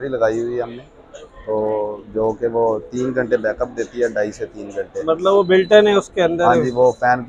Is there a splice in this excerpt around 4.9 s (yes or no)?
no